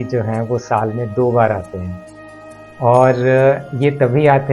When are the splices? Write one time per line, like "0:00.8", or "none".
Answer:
none